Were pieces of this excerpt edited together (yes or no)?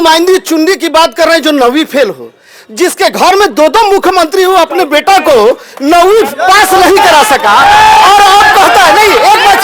no